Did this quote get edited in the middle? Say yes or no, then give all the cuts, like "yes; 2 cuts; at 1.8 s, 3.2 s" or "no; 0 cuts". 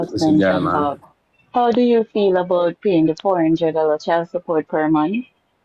no; 0 cuts